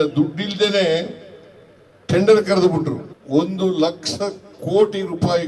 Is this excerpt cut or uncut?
cut